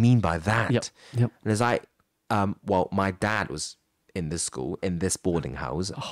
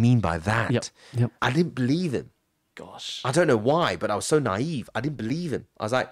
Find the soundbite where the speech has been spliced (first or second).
second